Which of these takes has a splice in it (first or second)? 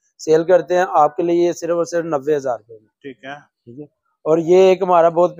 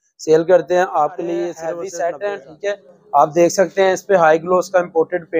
second